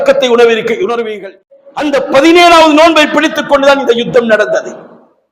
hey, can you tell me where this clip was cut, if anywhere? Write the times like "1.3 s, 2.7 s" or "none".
1.6 s